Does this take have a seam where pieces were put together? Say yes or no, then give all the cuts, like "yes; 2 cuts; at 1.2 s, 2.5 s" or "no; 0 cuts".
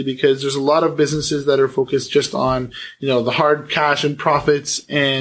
no; 0 cuts